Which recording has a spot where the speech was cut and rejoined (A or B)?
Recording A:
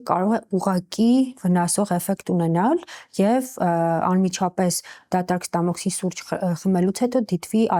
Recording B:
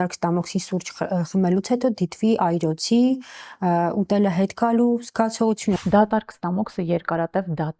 B